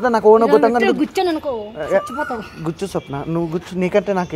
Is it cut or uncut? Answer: uncut